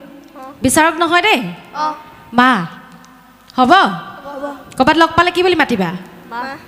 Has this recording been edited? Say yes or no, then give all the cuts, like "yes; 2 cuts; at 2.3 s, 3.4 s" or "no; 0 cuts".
no; 0 cuts